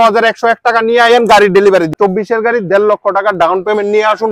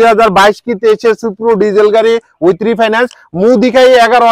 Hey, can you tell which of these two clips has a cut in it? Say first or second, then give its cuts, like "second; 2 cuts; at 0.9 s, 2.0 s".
first; 1 cut; at 1.9 s